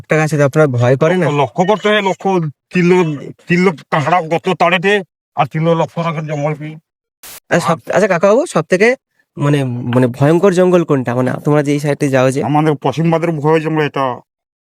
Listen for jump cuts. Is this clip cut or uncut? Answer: cut